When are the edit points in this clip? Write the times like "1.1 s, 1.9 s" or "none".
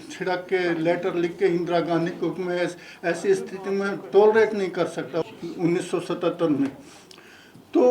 5.2 s